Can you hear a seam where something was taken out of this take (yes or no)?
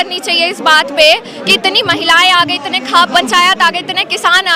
no